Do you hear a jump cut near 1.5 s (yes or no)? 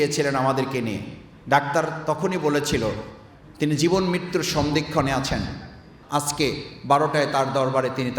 no